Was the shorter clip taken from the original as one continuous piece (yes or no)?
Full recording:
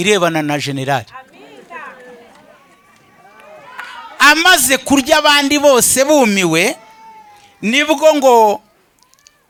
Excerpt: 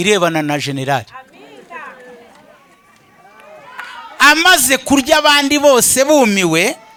yes